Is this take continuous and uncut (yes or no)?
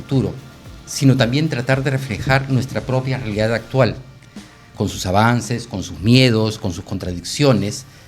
yes